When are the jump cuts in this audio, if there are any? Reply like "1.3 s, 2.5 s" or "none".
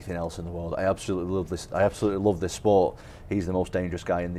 3.1 s